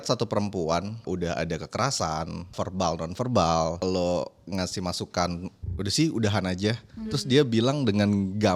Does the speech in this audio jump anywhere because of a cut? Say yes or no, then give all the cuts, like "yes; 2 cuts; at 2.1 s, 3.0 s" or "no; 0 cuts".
yes; 3 cuts; at 1.0 s, 2.5 s, 3.8 s